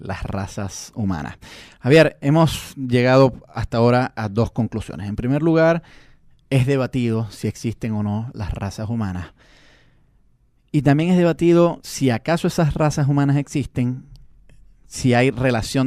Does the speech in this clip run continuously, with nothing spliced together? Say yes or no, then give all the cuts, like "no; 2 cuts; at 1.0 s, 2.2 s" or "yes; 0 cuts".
yes; 0 cuts